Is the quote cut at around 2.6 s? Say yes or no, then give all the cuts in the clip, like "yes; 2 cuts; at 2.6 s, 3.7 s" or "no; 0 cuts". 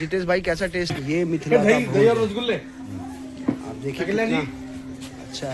no; 1 cut; at 1.0 s